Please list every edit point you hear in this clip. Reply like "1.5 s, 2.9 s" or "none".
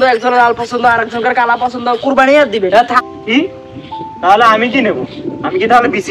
2.9 s